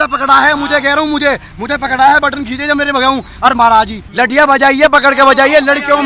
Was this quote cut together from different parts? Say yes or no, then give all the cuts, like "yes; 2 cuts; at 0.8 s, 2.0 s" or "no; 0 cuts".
yes; 1 cut; at 4.0 s